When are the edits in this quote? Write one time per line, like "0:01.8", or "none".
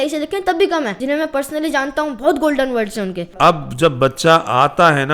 0:01.0
0:03.2